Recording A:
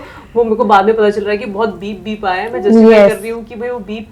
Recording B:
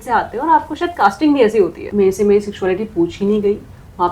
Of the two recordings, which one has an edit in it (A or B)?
B